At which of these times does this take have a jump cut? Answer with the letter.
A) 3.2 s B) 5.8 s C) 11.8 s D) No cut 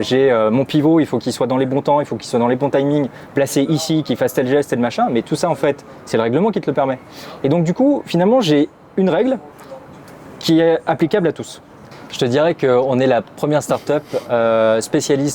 C